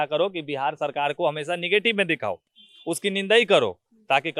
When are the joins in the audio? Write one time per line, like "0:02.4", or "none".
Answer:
none

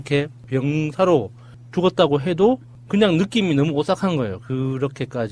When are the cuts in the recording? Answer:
0:01.4

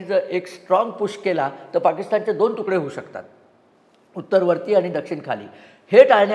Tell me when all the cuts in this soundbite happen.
none

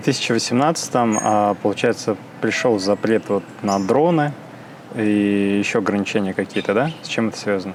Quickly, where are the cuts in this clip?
none

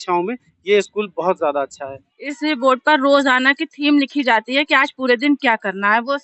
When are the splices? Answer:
none

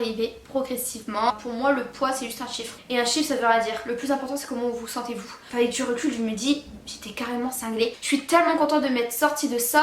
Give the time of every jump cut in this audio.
0:01.3
0:05.3
0:08.0

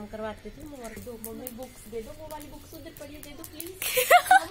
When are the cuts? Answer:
0:01.0

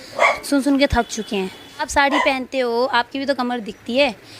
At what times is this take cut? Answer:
0:01.9

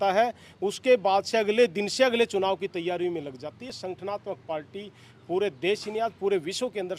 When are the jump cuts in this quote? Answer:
none

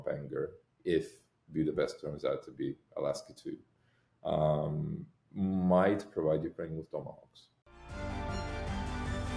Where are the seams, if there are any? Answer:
0:07.5

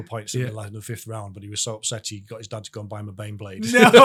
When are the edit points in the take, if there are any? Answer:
none

